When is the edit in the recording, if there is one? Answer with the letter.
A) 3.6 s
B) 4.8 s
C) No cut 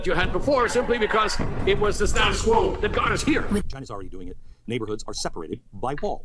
A